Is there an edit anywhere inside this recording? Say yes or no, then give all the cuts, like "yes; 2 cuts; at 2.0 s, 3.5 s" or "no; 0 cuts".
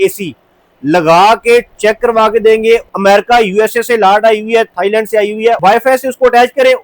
yes; 2 cuts; at 2.9 s, 5.6 s